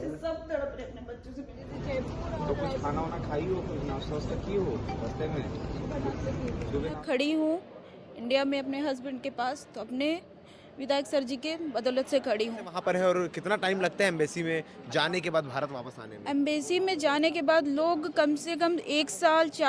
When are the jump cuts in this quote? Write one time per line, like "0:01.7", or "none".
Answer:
0:01.7
0:07.0
0:12.7